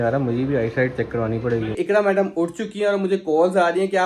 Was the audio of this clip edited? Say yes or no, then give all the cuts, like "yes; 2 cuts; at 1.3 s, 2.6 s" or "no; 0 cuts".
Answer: yes; 1 cut; at 1.7 s